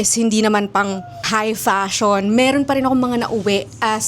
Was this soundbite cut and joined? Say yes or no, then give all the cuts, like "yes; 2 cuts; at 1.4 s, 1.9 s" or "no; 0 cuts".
yes; 1 cut; at 1.3 s